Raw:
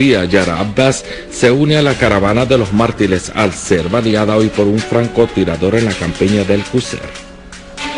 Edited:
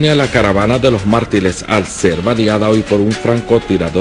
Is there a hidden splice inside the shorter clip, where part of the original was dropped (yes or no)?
no